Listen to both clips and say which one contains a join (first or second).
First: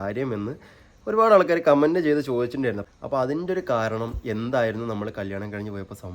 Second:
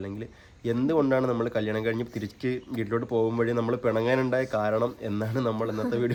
first